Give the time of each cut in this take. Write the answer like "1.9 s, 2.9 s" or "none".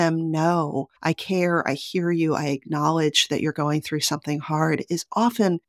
none